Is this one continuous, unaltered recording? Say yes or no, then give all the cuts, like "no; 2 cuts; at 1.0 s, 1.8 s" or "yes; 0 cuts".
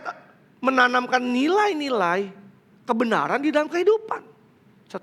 yes; 0 cuts